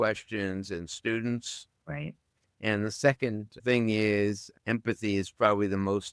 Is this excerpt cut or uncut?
cut